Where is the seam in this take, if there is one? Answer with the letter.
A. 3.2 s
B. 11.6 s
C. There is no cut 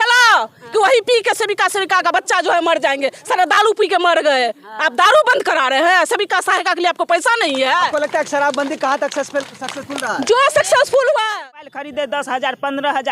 B